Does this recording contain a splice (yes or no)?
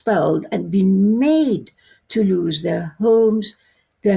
no